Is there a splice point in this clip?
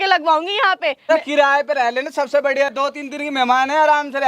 yes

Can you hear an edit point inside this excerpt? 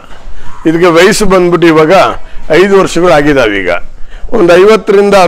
yes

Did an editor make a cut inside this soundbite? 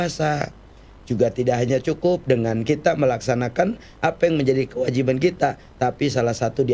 no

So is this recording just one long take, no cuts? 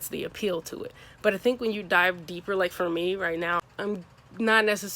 no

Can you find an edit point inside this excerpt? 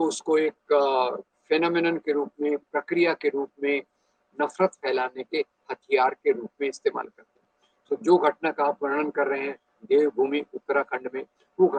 no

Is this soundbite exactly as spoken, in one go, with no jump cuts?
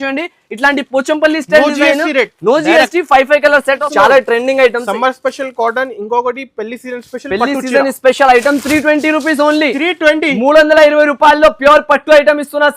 no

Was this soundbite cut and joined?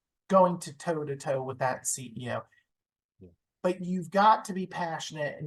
yes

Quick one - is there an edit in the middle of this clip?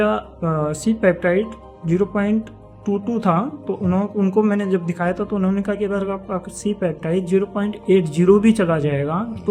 no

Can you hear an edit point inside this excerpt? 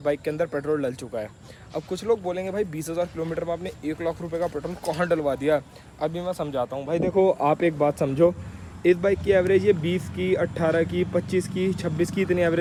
no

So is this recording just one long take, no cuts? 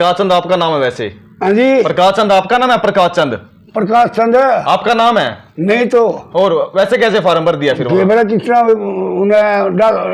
yes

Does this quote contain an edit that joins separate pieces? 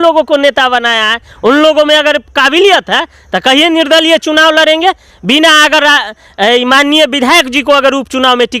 no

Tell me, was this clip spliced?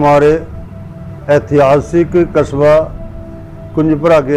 no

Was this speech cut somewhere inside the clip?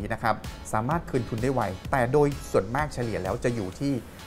no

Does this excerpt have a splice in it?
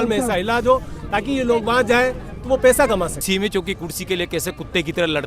yes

